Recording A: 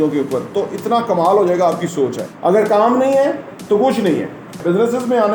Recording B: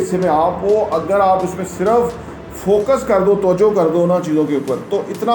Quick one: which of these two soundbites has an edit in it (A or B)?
A